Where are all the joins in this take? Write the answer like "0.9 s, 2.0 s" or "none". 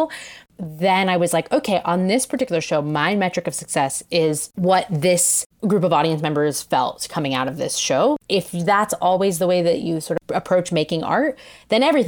8.2 s, 10.2 s